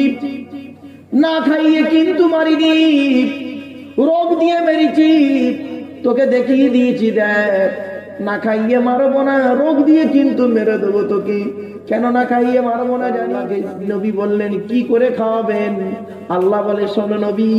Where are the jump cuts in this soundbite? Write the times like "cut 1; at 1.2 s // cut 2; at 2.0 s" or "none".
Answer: cut 1; at 13.4 s